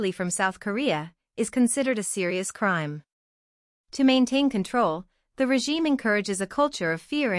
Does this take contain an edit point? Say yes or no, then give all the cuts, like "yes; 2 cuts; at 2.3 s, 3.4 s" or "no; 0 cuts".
yes; 1 cut; at 3.3 s